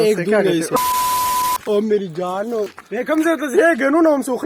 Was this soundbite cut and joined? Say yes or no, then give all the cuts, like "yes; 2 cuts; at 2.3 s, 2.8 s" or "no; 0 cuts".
yes; 2 cuts; at 1.6 s, 2.8 s